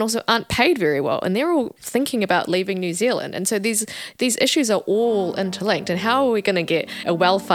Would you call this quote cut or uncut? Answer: uncut